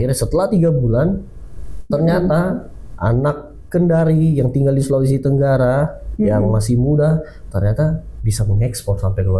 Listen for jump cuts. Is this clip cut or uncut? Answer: uncut